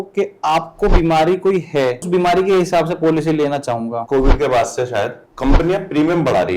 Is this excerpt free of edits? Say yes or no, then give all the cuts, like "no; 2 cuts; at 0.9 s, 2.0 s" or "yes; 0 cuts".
no; 2 cuts; at 2.1 s, 4.0 s